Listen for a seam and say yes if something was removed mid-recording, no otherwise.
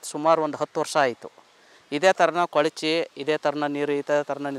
no